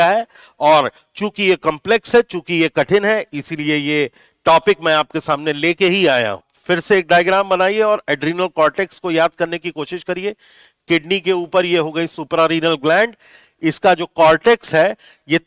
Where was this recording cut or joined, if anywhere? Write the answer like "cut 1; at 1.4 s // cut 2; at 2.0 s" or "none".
cut 1; at 6.5 s